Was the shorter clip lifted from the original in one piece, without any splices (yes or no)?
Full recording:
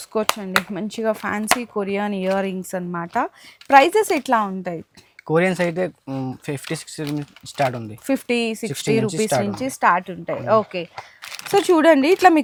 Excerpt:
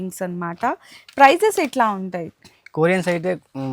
yes